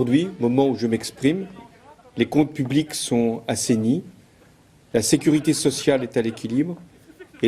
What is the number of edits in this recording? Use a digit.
1